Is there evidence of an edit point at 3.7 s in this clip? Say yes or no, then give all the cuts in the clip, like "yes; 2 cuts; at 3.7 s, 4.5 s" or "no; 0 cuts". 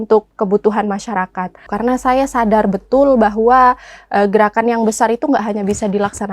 no; 1 cut; at 1.7 s